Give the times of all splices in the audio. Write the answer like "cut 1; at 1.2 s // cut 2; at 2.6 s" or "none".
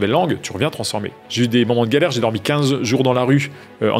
cut 1; at 1.2 s